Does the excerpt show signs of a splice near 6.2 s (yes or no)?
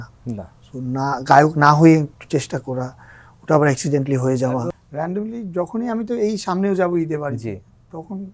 no